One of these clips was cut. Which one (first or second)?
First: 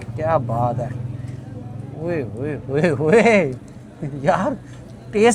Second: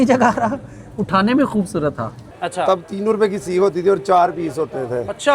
second